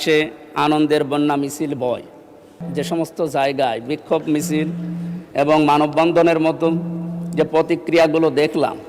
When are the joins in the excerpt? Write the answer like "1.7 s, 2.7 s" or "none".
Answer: 2.7 s